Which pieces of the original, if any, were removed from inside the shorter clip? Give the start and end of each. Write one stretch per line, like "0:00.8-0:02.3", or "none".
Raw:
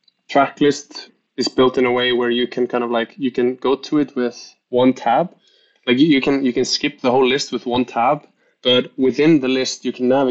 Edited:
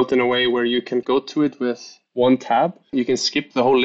0:02.7-0:03.6
0:05.5-0:06.4

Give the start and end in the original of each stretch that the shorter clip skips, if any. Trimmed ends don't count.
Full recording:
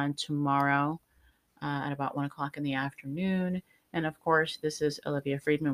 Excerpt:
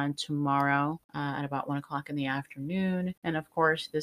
0:01.1-0:01.5
0:03.6-0:03.9

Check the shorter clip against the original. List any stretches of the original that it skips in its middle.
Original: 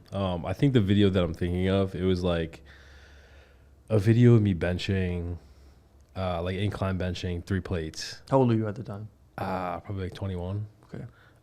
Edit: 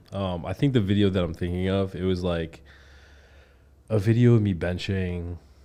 none

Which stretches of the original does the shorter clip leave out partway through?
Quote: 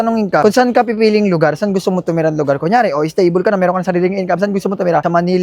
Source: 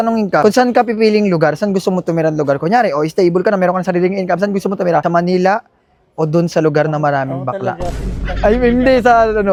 none

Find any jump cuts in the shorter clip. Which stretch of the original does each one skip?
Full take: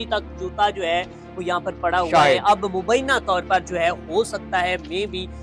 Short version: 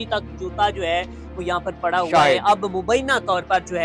none

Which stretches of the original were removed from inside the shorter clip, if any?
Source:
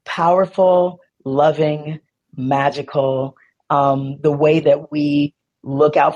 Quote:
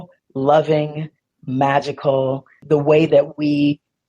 0:03.5-0:04.1

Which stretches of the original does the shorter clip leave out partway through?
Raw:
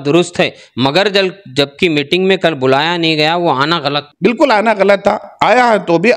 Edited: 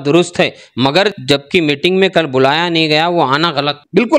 0:01.1-0:01.4

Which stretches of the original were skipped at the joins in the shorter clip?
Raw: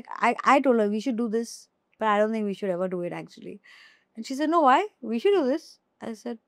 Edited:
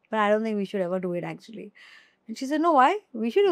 none

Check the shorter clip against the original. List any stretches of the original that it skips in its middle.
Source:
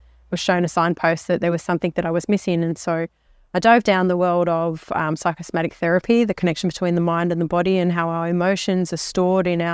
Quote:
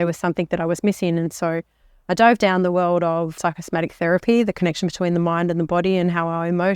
0:04.8-0:05.2

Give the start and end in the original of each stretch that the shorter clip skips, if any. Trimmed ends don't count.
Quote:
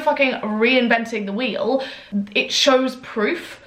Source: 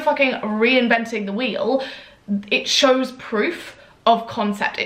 0:02.0-0:02.1

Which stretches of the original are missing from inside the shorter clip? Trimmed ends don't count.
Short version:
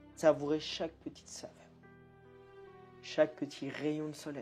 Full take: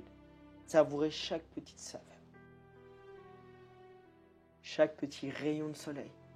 0:03.6-0:04.7

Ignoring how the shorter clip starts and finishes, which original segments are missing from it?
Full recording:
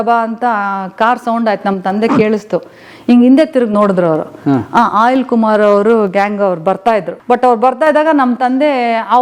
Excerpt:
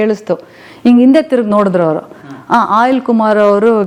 none

